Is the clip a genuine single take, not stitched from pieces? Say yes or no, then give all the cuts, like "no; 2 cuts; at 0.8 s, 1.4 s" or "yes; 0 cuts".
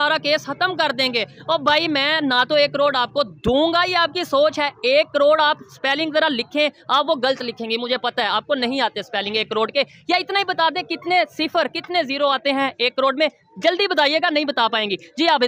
yes; 0 cuts